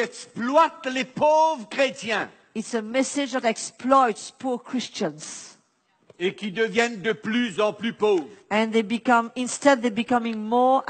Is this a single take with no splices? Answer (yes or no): yes